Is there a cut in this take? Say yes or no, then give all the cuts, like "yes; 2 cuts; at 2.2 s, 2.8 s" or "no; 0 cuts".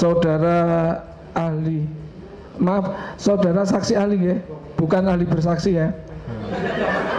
no; 0 cuts